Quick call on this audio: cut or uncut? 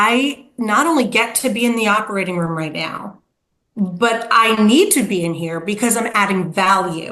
uncut